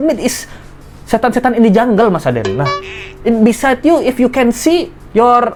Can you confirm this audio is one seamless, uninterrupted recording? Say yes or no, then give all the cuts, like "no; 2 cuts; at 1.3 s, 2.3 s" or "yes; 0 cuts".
yes; 0 cuts